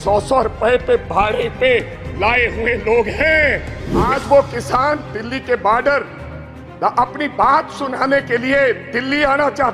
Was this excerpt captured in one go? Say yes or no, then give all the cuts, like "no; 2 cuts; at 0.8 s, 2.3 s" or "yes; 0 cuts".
no; 1 cut; at 4.1 s